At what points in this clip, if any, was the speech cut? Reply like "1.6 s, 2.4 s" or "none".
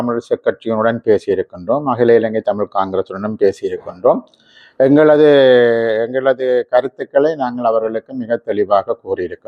none